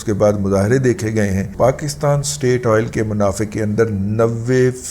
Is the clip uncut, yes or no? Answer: no